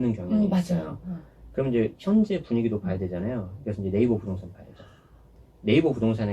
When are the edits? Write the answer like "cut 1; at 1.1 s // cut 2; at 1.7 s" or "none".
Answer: cut 1; at 5.4 s